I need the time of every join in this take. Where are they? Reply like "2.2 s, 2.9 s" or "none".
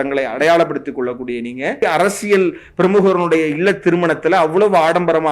1.8 s